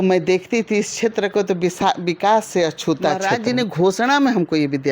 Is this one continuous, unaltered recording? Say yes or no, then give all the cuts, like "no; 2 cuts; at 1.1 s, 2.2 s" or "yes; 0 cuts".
no; 1 cut; at 3.3 s